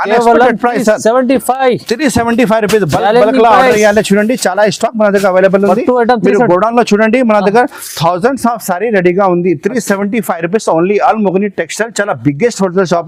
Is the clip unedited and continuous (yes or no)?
yes